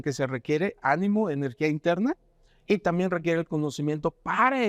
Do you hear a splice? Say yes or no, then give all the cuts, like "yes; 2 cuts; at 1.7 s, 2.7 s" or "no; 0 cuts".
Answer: no; 0 cuts